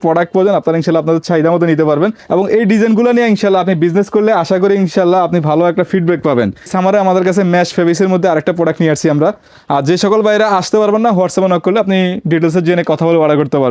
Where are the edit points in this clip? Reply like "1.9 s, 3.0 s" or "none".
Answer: 2.2 s, 6.7 s, 9.5 s